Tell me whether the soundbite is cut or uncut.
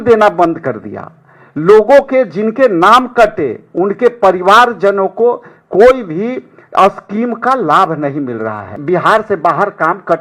cut